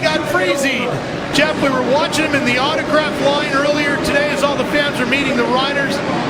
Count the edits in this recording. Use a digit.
0